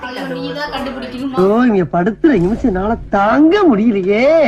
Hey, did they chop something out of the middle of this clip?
no; 0 cuts

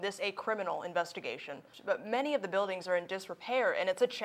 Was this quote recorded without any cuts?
no; 1 cut; at 1.7 s

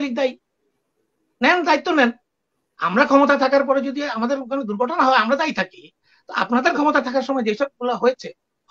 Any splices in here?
no; 0 cuts

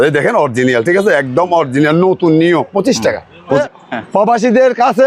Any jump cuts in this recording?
yes; 1 cut; at 3.6 s

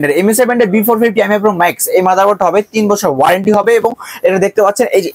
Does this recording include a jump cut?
no; 0 cuts

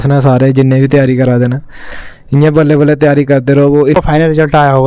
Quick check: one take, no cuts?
no; 1 cut; at 3.9 s

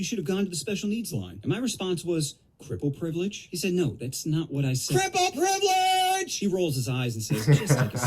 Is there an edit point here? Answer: no; 0 cuts

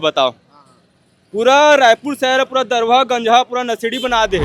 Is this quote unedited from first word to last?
yes; 0 cuts

